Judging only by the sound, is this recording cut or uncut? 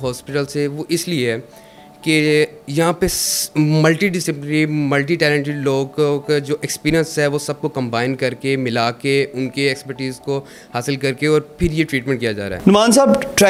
uncut